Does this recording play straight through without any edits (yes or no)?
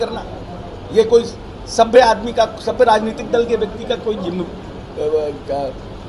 yes